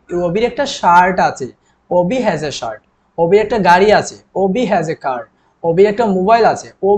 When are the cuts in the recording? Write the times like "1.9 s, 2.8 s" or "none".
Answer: none